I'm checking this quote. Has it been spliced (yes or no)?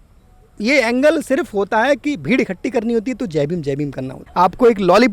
yes